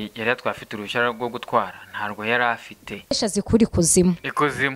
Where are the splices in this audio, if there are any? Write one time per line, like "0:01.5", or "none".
0:03.0